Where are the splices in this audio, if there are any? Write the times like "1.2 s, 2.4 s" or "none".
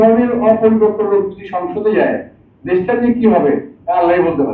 none